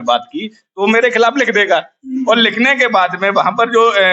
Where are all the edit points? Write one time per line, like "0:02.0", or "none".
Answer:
none